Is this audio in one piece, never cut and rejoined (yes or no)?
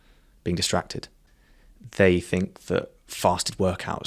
no